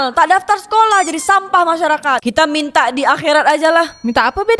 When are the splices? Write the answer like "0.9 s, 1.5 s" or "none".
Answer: 2.4 s